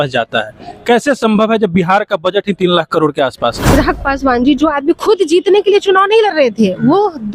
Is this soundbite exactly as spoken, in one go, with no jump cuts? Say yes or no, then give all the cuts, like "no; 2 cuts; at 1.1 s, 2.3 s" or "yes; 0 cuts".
no; 2 cuts; at 3.7 s, 5.0 s